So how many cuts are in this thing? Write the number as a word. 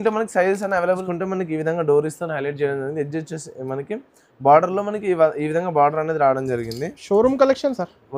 one